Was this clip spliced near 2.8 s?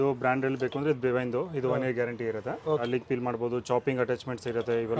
yes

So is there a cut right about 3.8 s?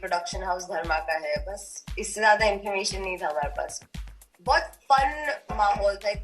yes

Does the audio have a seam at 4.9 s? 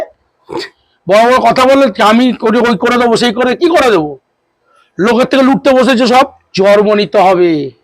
no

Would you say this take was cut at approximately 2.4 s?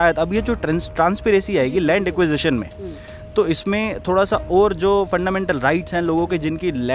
no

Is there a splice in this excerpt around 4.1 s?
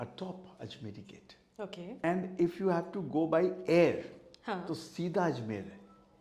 no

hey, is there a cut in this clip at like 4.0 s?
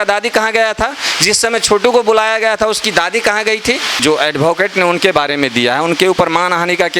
yes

